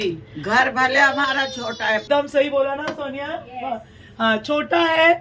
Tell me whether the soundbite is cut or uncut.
cut